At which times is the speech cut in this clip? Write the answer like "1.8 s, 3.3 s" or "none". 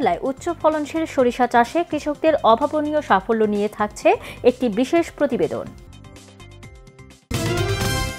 7.3 s